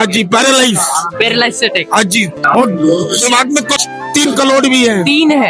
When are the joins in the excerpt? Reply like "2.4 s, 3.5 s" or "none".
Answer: 2.4 s, 3.7 s